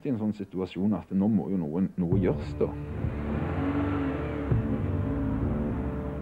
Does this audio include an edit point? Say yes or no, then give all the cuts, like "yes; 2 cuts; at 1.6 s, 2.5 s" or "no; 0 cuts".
no; 0 cuts